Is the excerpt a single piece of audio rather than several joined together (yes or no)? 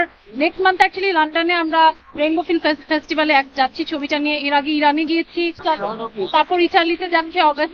no